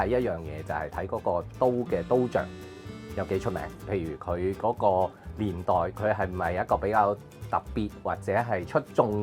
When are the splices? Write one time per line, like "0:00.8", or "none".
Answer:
none